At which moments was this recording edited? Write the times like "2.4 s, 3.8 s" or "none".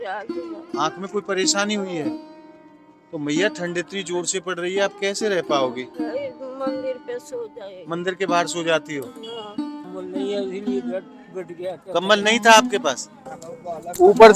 9.9 s, 13.3 s